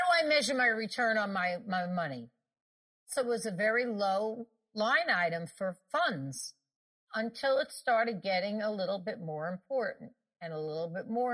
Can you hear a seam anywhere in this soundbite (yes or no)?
yes